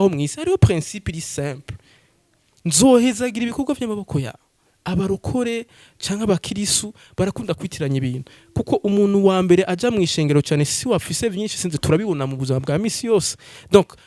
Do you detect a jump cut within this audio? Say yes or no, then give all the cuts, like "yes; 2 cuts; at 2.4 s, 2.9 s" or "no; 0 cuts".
no; 0 cuts